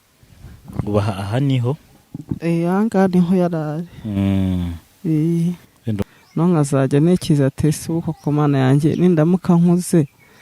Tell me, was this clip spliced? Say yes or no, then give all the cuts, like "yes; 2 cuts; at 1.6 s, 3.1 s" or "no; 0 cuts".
yes; 1 cut; at 6.0 s